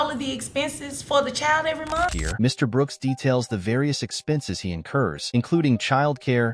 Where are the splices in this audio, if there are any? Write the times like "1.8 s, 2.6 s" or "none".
none